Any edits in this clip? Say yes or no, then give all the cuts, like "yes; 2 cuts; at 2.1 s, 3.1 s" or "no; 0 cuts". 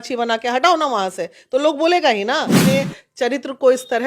yes; 1 cut; at 2.6 s